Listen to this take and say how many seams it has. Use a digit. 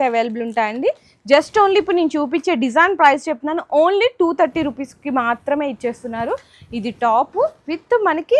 0